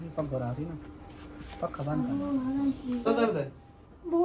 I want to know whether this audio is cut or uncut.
cut